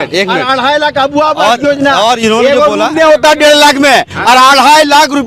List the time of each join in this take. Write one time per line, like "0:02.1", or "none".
none